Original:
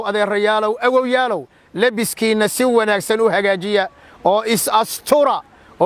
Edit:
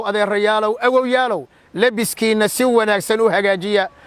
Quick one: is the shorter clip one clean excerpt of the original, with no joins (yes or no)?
yes